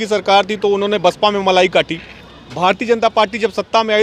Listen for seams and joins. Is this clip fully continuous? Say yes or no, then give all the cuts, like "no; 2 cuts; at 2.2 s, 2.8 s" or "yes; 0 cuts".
yes; 0 cuts